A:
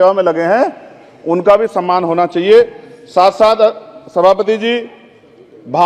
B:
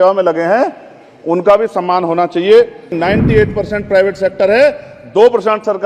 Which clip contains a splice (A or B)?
B